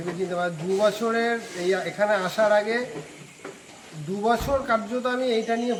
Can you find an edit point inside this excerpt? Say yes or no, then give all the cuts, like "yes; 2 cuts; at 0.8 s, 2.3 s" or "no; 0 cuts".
no; 0 cuts